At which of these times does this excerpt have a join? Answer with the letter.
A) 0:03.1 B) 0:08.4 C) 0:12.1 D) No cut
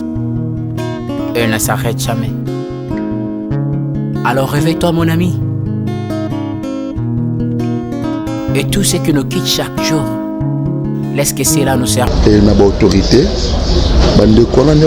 C